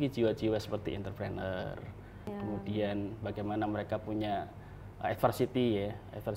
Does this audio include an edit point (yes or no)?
yes